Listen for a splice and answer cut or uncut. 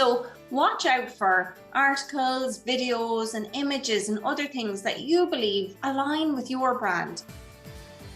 cut